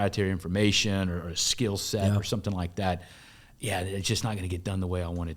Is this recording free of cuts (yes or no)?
yes